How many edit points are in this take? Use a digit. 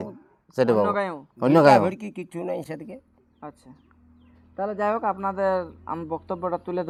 0